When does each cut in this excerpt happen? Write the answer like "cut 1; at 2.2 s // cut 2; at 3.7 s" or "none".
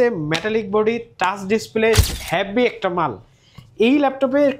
cut 1; at 2.1 s